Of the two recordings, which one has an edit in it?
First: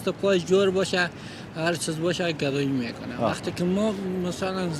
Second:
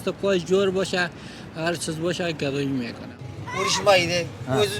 second; 1 cut; at 3.1 s

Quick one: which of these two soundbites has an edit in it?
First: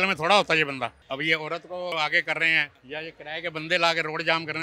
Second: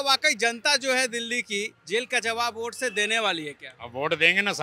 first; 3 cuts; at 1.0 s, 1.9 s, 2.7 s

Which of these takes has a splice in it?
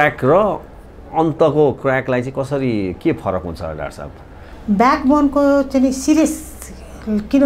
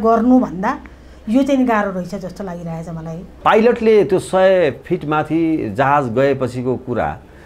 second; 1 cut; at 3.4 s

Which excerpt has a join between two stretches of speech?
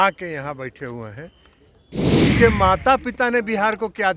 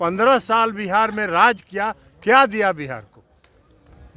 first; 1 cut; at 2.0 s

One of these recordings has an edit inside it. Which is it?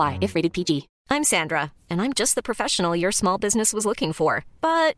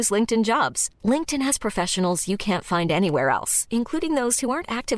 first; 1 cut; at 0.9 s

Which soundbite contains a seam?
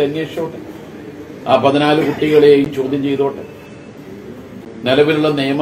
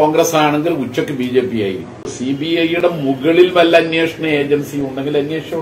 second; 1 cut; at 2.1 s

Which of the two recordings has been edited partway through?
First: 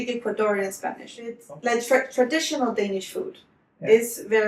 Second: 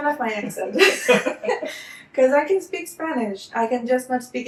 first; 1 cut; at 1.4 s

